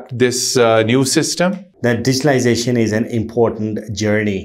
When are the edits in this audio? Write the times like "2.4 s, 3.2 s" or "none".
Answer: 1.7 s